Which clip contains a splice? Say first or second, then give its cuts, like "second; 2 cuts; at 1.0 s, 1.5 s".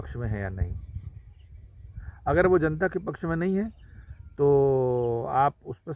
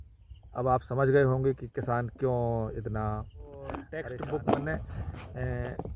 second; 1 cut; at 3.9 s